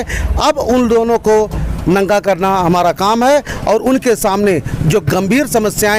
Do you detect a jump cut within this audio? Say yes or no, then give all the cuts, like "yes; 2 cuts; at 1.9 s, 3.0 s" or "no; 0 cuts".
no; 0 cuts